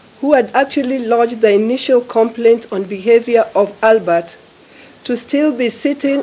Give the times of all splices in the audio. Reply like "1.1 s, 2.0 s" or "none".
none